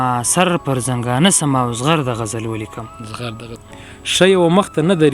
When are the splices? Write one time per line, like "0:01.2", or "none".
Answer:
0:03.5